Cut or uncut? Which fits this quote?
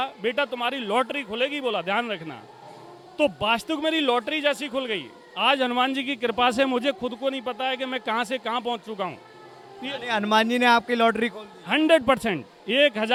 uncut